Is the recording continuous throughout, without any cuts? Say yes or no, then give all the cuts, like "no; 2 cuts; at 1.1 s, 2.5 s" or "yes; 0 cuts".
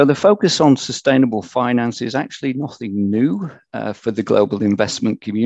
yes; 0 cuts